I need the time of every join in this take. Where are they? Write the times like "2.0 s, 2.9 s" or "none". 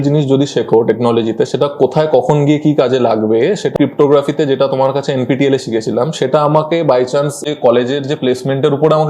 3.7 s, 7.4 s